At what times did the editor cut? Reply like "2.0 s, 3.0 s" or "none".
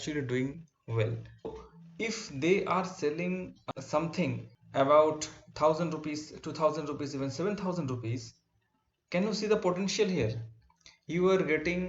1.5 s, 3.6 s, 4.5 s

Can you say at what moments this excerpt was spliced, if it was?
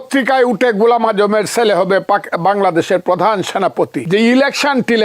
4.0 s

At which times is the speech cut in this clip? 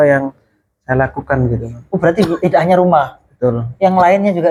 none

